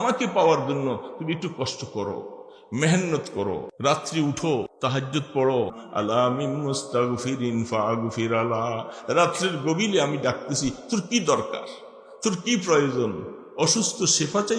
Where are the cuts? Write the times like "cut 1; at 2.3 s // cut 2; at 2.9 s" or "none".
cut 1; at 3.7 s // cut 2; at 4.7 s // cut 3; at 5.8 s